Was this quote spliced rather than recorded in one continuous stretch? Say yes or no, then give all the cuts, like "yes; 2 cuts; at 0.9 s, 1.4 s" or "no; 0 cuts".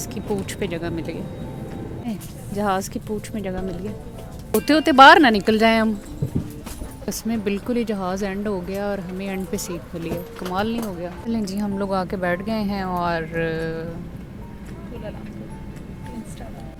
no; 0 cuts